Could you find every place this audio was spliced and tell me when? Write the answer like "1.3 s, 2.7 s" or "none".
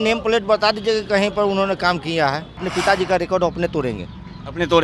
2.7 s